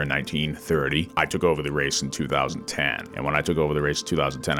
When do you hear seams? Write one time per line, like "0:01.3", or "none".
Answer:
0:01.1
0:03.0